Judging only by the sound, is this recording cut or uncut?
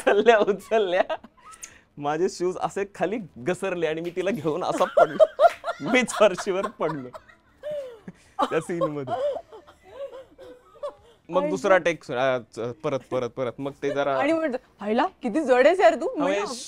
uncut